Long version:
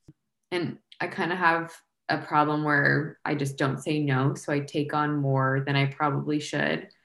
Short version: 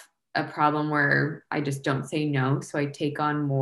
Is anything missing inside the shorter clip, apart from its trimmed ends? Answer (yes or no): no